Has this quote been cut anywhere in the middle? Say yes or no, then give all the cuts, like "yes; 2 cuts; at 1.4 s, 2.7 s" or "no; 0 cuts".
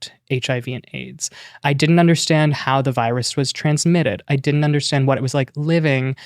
yes; 1 cut; at 1.6 s